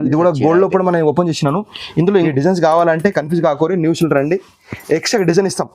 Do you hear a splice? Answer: yes; 1 cut; at 2.3 s

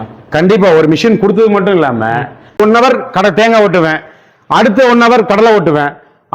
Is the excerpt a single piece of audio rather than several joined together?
no; 1 cut; at 2.6 s

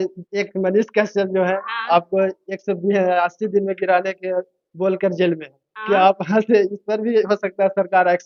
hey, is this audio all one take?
yes; 0 cuts

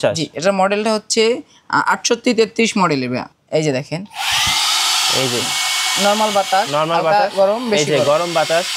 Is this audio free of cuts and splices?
no; 1 cut; at 3.3 s

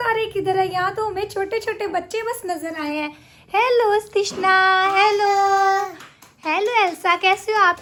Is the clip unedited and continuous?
yes; 0 cuts

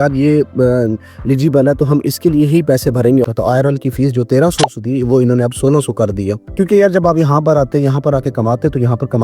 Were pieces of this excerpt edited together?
yes; 2 cuts; at 3.2 s, 6.4 s

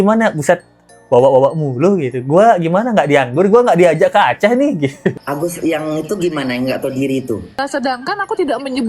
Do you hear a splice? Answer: yes; 2 cuts; at 5.2 s, 7.5 s

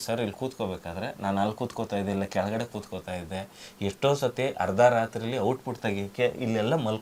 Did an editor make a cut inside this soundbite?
no; 0 cuts

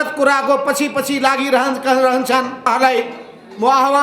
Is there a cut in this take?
yes; 1 cut; at 2.7 s

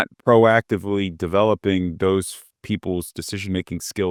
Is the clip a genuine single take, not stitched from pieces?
yes; 0 cuts

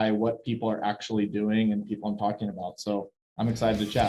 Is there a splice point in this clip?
yes; 1 cut; at 3.2 s

